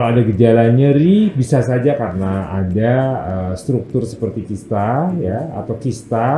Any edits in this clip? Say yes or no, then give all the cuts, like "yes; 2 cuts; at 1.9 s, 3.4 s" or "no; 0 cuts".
no; 0 cuts